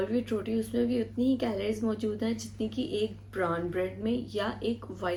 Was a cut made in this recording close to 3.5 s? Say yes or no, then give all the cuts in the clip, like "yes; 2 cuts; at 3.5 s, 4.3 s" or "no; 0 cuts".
no; 0 cuts